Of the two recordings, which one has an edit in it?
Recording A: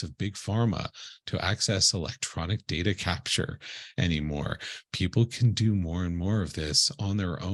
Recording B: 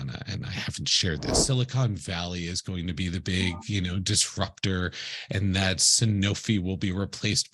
B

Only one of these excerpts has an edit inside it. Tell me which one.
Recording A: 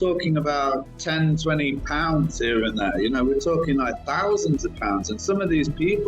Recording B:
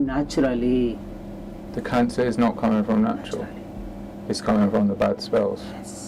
A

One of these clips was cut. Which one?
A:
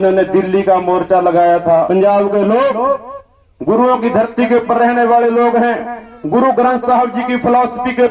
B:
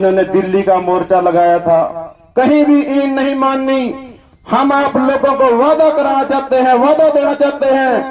A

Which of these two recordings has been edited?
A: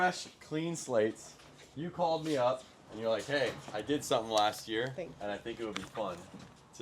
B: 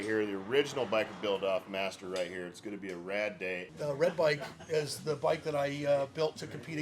B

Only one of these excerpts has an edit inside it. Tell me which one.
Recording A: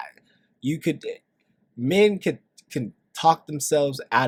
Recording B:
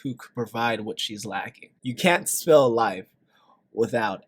B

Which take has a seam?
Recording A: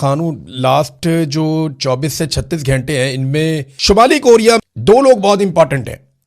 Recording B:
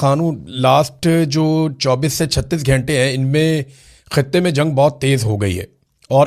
A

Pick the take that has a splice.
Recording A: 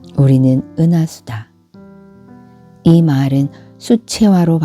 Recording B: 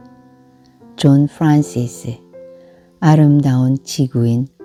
A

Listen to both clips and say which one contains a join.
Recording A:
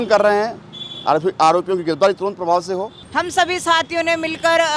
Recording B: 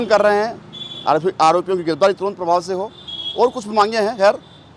A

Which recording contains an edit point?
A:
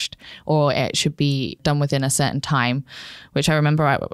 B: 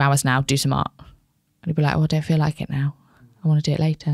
A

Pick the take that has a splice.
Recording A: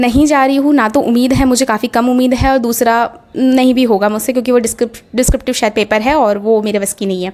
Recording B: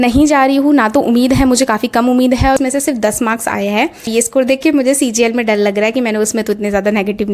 B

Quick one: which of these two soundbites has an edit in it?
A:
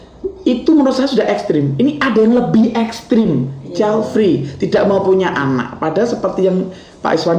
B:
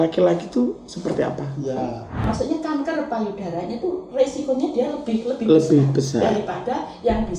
B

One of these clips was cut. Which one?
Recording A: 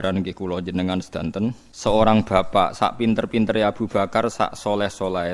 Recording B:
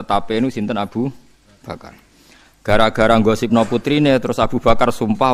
A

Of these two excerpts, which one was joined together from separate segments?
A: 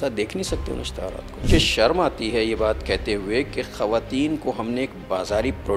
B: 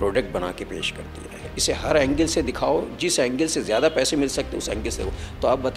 B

